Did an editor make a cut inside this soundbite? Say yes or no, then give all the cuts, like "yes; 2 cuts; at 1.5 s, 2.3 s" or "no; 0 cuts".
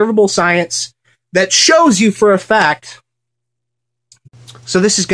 no; 0 cuts